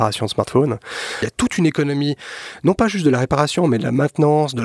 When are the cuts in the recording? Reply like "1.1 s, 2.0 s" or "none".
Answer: 1.3 s